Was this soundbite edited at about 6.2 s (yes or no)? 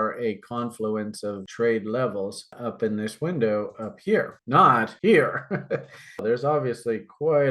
yes